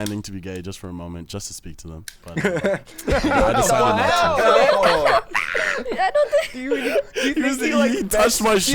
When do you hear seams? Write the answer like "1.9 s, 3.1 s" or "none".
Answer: 2.1 s

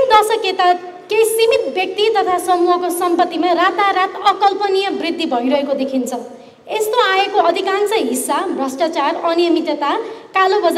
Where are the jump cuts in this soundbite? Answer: none

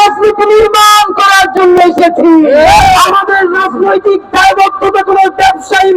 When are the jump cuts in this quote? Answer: 2.8 s

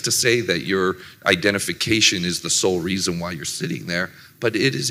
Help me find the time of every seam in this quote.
none

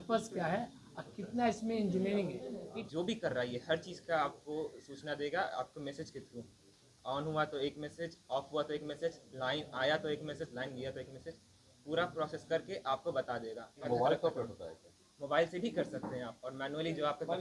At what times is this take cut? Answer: 2.8 s, 13.9 s

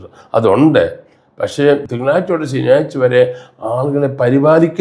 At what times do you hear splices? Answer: 1.9 s

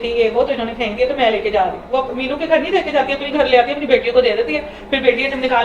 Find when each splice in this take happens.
1.9 s

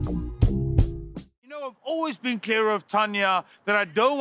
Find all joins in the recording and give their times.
1.5 s

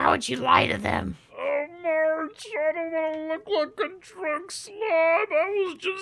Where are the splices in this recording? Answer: 1.2 s

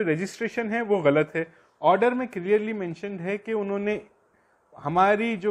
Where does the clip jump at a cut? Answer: none

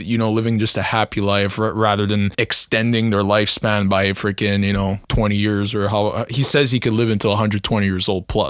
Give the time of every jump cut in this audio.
2.3 s, 5.0 s

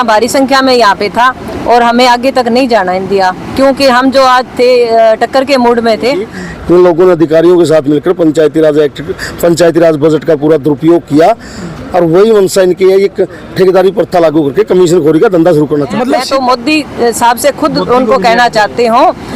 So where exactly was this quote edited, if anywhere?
6.4 s, 16.2 s

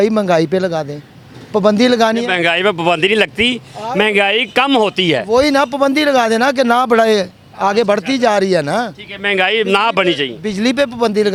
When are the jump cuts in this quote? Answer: none

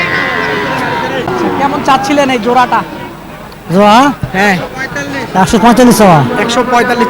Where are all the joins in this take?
1.3 s

